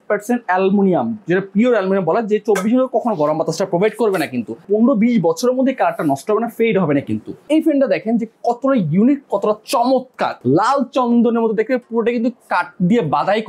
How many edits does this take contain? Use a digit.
3